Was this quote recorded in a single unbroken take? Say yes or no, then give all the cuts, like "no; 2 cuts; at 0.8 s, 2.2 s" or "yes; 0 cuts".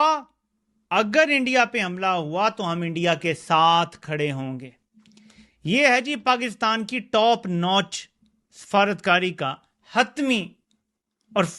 yes; 0 cuts